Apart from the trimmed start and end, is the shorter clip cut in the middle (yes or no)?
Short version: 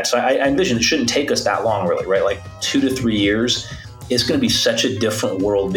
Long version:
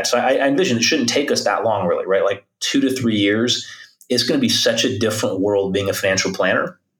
no